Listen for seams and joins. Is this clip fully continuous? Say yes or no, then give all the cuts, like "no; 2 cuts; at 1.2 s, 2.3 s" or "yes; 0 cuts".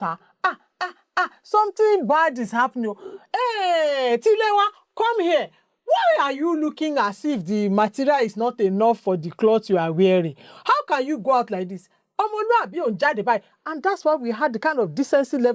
yes; 0 cuts